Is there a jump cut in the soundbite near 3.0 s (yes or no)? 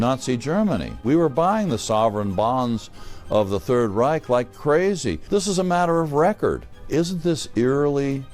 no